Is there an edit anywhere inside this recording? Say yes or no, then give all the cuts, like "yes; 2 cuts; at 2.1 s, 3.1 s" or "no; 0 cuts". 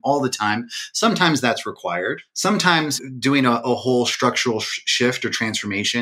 yes; 2 cuts; at 2.3 s, 3.0 s